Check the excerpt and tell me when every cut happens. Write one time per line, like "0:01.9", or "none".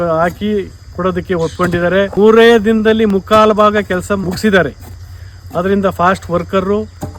0:02.1
0:04.2